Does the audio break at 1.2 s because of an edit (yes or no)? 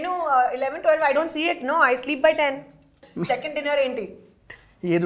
no